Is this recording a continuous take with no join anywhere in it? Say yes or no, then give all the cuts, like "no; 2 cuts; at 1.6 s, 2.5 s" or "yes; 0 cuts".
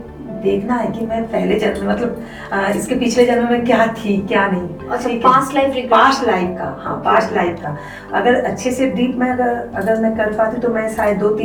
yes; 0 cuts